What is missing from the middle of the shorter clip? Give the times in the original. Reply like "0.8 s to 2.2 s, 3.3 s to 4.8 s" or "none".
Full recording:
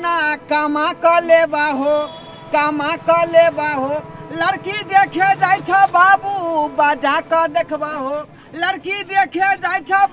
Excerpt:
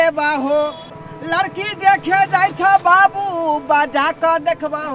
2.3 s to 4.1 s